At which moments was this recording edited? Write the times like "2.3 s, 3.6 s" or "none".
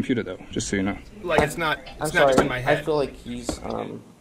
1.1 s